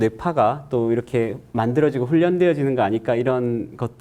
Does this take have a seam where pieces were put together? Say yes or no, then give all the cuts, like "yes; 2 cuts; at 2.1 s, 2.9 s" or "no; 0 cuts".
no; 0 cuts